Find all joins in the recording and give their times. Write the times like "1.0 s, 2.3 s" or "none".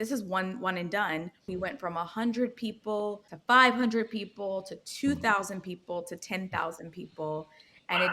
1.5 s, 3.3 s